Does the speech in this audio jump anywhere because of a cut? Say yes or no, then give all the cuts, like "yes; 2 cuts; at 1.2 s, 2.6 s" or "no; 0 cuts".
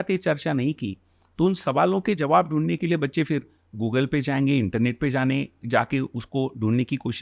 no; 0 cuts